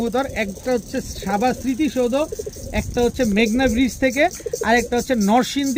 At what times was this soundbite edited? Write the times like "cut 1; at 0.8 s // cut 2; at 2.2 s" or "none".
none